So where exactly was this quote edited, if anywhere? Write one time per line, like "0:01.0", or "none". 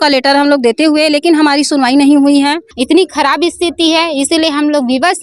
0:02.7